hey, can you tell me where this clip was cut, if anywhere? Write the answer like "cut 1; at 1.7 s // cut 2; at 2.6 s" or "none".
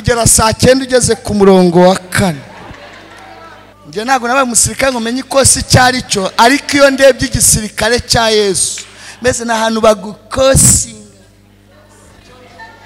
cut 1; at 3.7 s